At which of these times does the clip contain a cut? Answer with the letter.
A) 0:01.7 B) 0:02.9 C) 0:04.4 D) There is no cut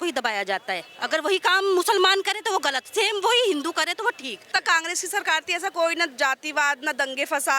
C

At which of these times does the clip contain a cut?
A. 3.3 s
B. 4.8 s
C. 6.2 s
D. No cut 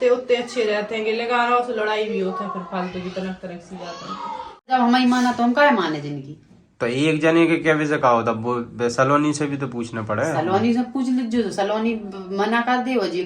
B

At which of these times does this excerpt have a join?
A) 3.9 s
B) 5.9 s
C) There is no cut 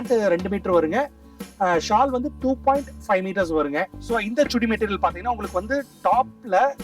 A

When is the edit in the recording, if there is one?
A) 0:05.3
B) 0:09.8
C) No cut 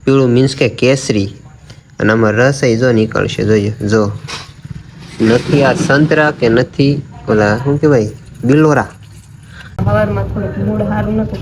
B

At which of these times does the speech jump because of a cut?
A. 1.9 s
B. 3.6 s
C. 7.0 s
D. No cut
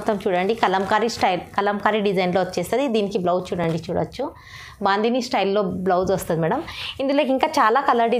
D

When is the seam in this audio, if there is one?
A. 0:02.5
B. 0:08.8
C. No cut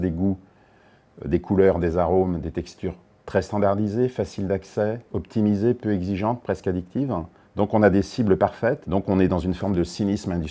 B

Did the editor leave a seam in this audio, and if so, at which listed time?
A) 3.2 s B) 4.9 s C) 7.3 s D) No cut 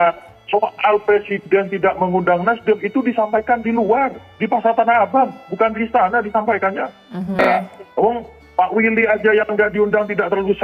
C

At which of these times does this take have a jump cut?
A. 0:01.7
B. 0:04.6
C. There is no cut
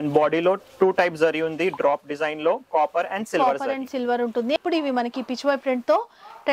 B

